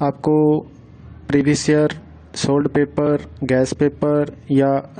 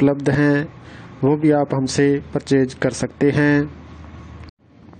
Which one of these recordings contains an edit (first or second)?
first